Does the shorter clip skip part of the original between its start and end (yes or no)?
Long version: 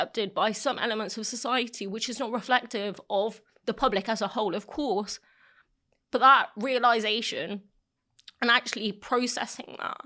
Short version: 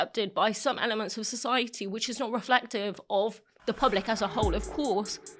no